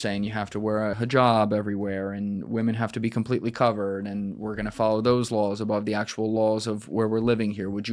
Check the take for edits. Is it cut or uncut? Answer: cut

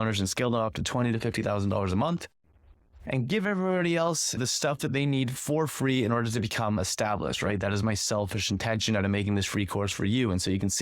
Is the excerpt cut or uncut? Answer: cut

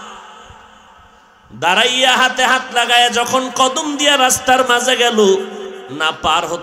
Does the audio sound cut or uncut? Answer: uncut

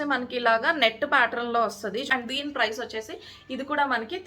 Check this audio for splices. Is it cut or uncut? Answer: cut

